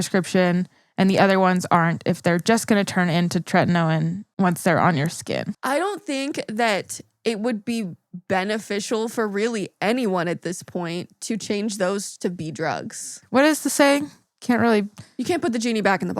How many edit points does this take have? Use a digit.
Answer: 3